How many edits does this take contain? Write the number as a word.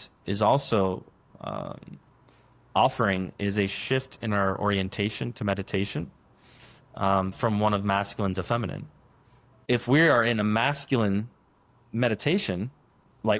one